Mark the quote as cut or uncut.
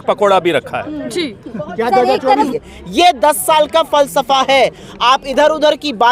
cut